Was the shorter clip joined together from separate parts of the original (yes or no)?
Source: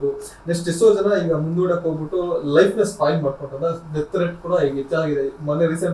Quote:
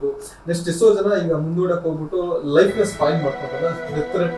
no